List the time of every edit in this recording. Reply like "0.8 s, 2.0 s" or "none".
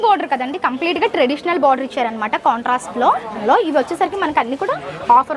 3.3 s